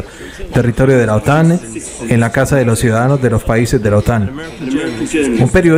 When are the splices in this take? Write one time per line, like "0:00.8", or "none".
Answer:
0:04.4